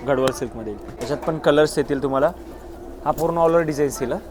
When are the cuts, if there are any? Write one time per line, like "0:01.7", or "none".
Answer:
0:00.9